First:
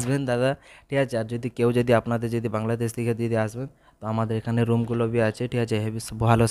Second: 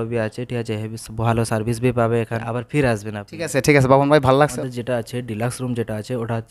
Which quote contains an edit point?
second; 2 cuts; at 2.4 s, 4.6 s

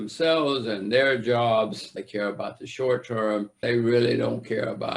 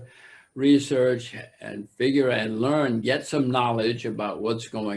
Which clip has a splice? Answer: first; 2 cuts; at 1.8 s, 3.6 s

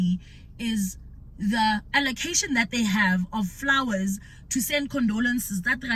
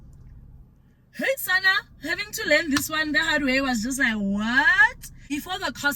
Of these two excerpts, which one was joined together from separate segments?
second; 1 cut; at 5.0 s

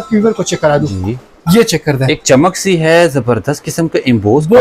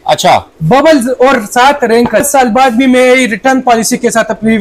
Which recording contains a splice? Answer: second; 1 cut; at 2.3 s

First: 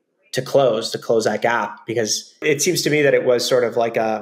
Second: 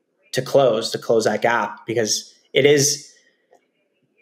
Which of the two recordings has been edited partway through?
first; 1 cut; at 2.4 s

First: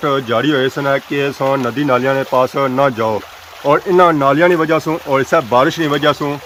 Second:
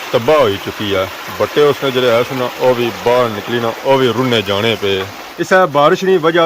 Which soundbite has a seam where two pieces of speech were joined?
second; 2 cuts; at 3.8 s, 5.2 s

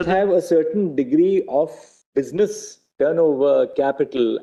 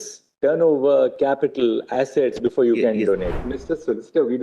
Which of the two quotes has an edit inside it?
second; 1 cut; at 3.3 s

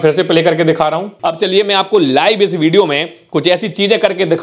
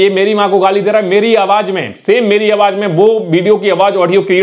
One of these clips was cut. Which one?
first; 1 cut; at 1.2 s

